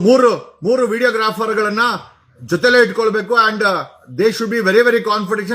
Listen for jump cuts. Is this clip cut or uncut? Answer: uncut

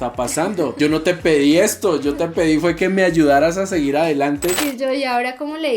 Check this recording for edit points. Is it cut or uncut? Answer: cut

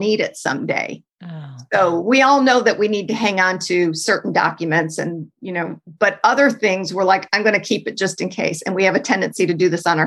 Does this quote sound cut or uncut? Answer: uncut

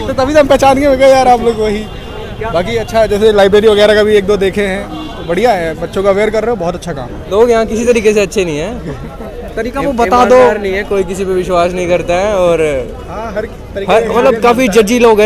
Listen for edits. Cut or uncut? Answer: cut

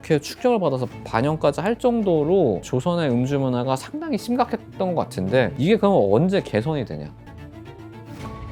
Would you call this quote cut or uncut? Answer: uncut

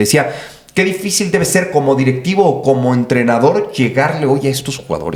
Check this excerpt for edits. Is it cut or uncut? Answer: uncut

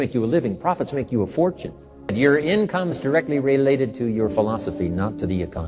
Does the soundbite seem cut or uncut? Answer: cut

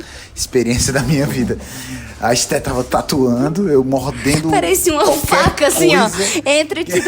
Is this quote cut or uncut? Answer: uncut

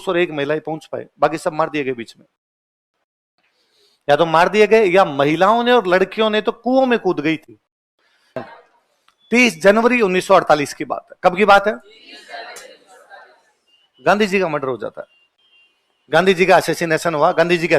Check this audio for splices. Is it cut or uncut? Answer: cut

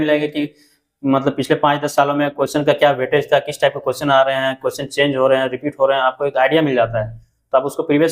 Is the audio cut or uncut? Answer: uncut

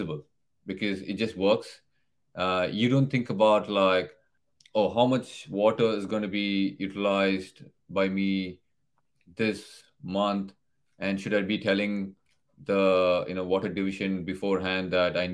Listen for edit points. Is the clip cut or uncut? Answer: uncut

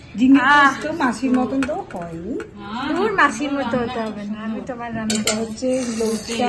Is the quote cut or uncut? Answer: uncut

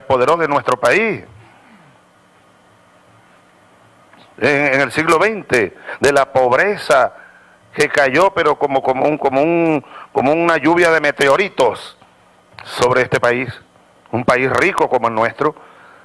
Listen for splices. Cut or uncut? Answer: uncut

